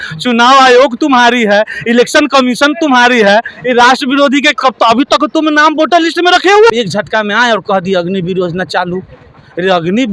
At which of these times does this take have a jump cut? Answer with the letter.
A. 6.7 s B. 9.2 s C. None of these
A